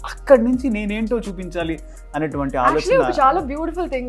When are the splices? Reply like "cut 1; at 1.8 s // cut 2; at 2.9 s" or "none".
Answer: none